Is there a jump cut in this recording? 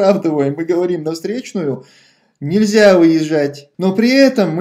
yes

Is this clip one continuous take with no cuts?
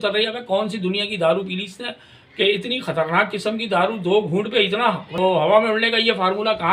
no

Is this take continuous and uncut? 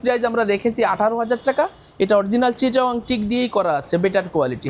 yes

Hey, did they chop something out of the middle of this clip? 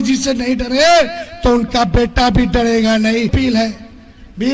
yes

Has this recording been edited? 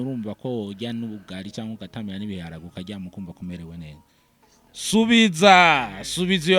no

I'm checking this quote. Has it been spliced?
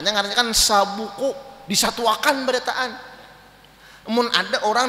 no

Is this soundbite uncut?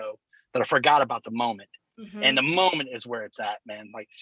yes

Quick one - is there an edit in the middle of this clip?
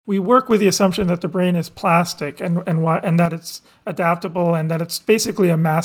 no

